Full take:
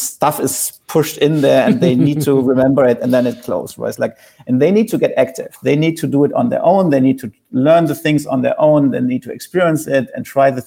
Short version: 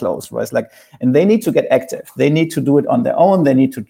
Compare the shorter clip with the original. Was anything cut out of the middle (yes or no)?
no